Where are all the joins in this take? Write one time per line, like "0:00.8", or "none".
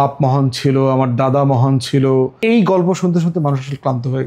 0:02.3

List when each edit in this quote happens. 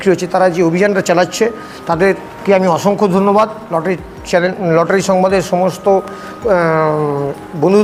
none

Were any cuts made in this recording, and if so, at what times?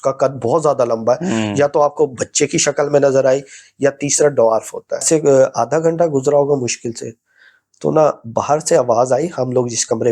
0:05.0

